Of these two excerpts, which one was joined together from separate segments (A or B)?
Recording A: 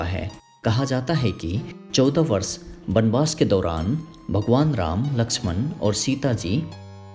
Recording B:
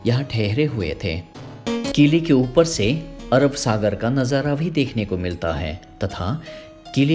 B